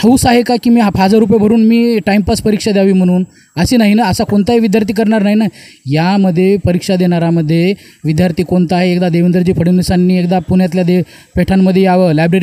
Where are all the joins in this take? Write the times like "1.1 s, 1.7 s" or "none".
none